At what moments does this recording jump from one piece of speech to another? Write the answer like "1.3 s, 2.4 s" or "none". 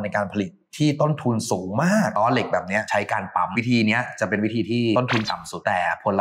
2.1 s, 3.5 s, 5.0 s